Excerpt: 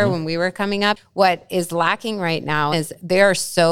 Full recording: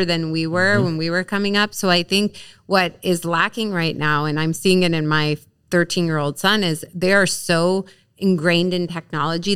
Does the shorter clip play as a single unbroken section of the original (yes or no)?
no